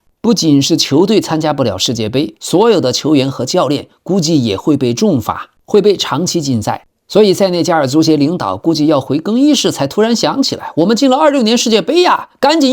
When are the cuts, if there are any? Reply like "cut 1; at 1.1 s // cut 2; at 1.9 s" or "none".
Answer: none